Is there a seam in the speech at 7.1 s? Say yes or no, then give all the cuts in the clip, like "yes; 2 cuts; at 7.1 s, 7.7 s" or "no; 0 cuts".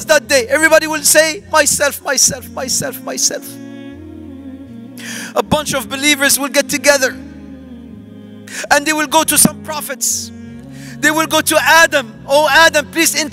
yes; 4 cuts; at 3.4 s, 5.3 s, 7.1 s, 8.5 s